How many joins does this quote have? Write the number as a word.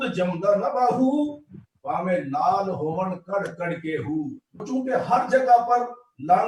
one